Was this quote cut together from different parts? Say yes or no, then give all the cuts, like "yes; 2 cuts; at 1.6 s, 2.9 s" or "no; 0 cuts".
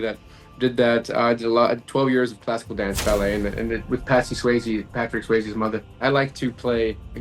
yes; 1 cut; at 6.0 s